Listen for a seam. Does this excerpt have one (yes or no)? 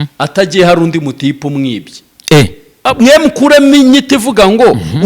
yes